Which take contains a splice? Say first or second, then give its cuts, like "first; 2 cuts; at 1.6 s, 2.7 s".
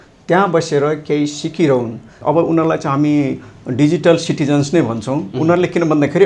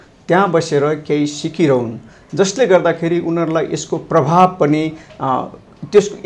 first; 1 cut; at 2.2 s